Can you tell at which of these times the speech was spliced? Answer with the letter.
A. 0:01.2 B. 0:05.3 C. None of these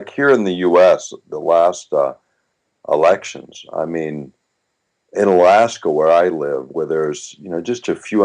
B